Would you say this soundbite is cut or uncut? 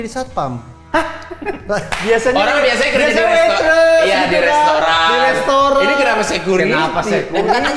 uncut